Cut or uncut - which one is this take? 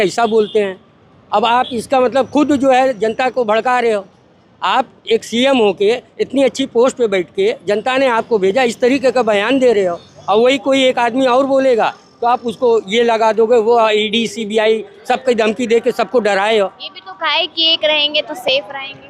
uncut